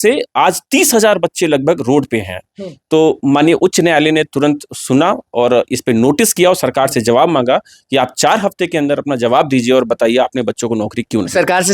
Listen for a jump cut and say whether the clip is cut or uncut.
uncut